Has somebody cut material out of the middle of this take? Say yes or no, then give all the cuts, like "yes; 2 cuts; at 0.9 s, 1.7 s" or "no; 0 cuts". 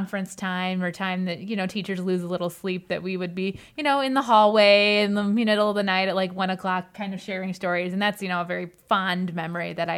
no; 0 cuts